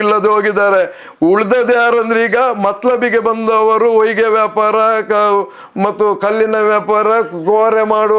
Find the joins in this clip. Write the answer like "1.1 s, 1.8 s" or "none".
none